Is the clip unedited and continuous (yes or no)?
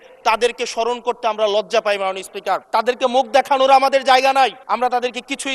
no